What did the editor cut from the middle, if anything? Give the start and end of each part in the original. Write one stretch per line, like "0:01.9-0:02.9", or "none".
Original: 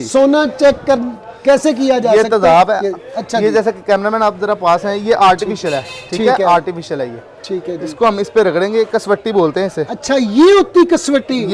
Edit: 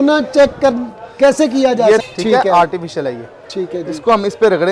0:02.3-0:06.0